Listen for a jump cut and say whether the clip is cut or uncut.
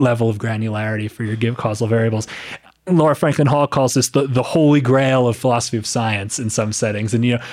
uncut